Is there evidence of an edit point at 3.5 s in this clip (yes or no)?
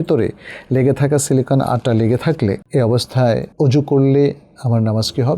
yes